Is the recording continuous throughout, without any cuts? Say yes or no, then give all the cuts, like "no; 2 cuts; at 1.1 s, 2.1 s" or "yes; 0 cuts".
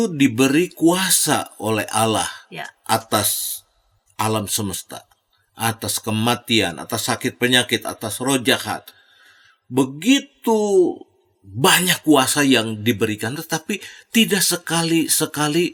yes; 0 cuts